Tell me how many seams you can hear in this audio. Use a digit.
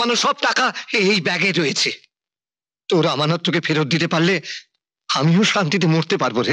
0